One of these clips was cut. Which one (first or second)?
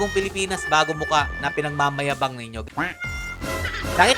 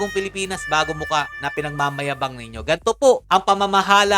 first